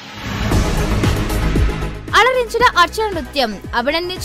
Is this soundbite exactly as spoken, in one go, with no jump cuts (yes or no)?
yes